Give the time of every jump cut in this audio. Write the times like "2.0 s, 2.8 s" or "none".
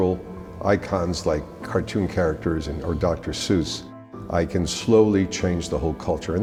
none